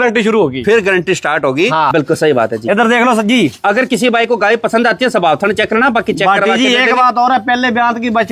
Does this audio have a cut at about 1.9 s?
yes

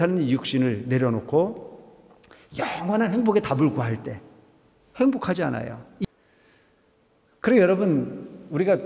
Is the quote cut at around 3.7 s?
no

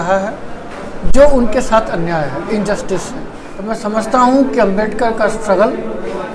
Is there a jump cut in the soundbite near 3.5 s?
yes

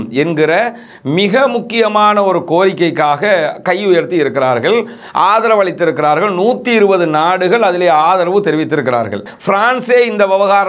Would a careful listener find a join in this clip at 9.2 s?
yes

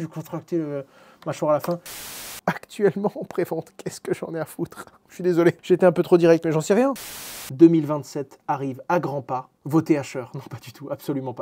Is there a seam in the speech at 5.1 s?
no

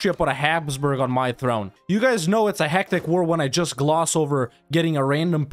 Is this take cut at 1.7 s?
yes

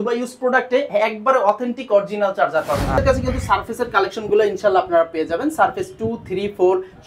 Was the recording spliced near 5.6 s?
no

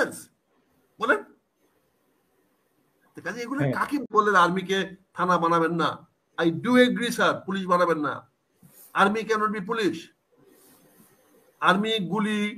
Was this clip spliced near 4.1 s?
yes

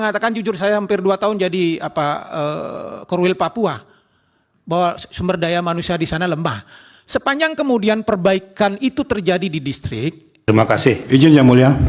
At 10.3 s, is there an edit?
yes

